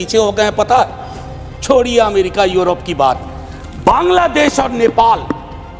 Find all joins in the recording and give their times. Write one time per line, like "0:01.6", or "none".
none